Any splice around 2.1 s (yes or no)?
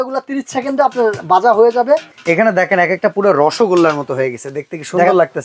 yes